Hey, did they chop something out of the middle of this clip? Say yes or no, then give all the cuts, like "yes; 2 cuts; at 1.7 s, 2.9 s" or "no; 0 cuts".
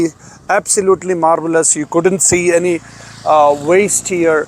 no; 0 cuts